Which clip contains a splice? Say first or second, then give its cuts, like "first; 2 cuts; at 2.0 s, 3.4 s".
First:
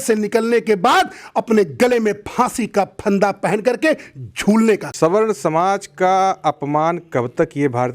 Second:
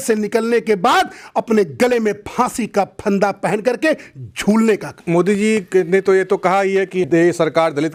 first; 1 cut; at 4.9 s